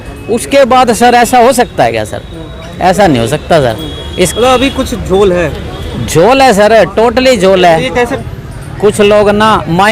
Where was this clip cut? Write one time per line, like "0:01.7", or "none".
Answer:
0:08.2